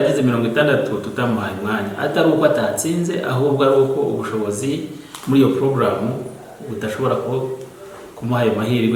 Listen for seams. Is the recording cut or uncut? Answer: uncut